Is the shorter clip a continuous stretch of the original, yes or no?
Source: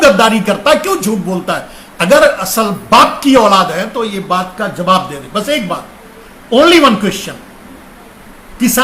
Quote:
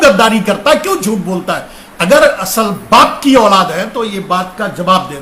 yes